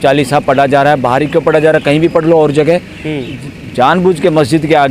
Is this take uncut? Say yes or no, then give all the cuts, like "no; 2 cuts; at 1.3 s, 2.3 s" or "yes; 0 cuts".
yes; 0 cuts